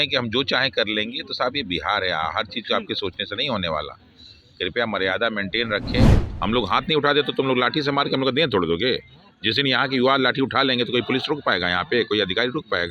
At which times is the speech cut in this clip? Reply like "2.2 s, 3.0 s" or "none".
6.2 s